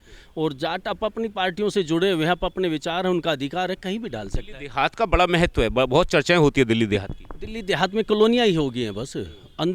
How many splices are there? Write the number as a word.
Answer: zero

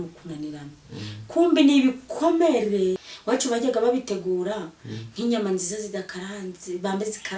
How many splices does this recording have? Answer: one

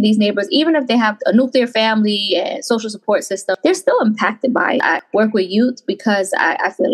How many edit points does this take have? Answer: two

